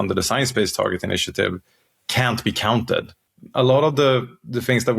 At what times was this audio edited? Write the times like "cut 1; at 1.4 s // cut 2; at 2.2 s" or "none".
cut 1; at 3.2 s